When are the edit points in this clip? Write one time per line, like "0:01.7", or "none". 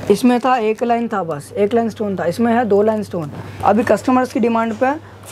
0:03.5